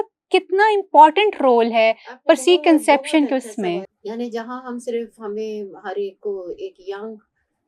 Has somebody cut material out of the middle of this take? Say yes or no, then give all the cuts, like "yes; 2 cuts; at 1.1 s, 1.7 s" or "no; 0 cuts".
yes; 1 cut; at 3.9 s